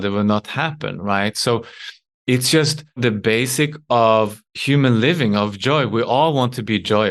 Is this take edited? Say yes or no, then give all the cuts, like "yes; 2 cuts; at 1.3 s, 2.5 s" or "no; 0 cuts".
yes; 1 cut; at 3.0 s